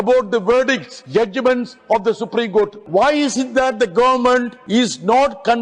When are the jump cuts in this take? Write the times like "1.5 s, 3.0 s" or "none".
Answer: 0.9 s, 2.8 s, 4.6 s